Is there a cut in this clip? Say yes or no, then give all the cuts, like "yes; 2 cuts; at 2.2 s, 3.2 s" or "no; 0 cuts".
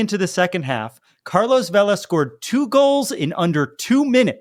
no; 0 cuts